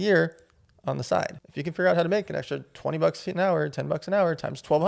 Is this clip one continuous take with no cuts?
no; 1 cut; at 1.4 s

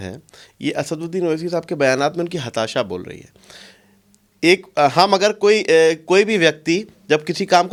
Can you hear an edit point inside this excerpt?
no; 0 cuts

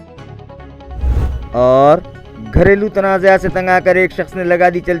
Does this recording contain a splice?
yes; 1 cut; at 1.2 s

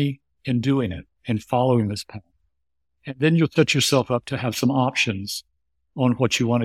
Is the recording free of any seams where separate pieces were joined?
yes; 0 cuts

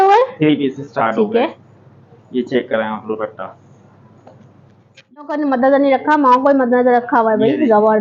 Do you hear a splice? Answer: yes; 1 cut; at 5.2 s

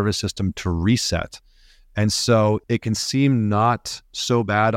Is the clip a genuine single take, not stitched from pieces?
no; 1 cut; at 2.6 s

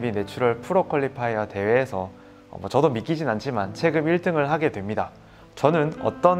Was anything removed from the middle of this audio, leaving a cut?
no; 0 cuts

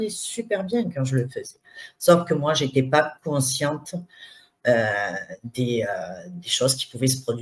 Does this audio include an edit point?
no; 0 cuts

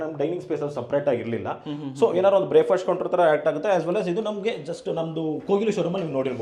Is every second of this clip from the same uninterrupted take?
yes; 0 cuts

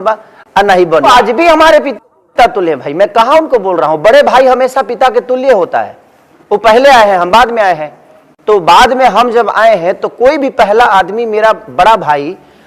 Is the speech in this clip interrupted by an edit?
yes; 1 cut; at 1.0 s

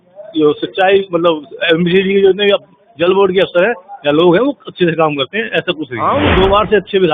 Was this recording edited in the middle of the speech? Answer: yes; 1 cut; at 5.9 s

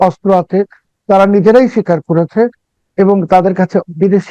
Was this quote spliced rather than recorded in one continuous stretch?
no; 0 cuts

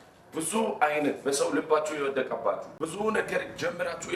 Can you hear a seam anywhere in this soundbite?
yes; 1 cut; at 2.8 s

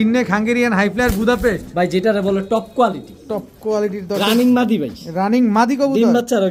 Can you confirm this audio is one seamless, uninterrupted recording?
yes; 0 cuts

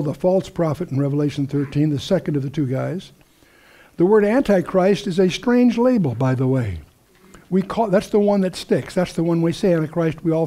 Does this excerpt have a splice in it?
yes; 1 cut; at 4.2 s

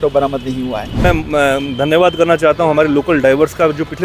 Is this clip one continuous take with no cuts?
no; 1 cut; at 1.0 s

